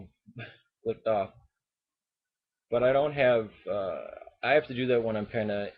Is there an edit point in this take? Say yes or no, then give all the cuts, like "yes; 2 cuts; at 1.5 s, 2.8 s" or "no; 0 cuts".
no; 0 cuts